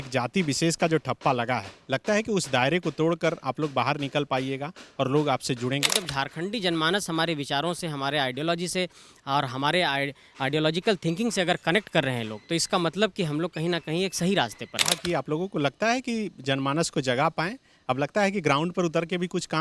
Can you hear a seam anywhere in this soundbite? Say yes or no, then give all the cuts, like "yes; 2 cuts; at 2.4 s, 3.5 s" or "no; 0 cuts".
yes; 2 cuts; at 6.1 s, 15.0 s